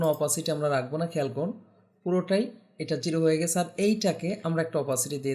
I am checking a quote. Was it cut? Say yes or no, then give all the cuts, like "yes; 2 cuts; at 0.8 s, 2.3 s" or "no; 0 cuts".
no; 0 cuts